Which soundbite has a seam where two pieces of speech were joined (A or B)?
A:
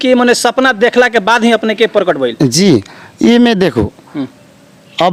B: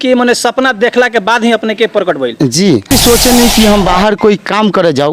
B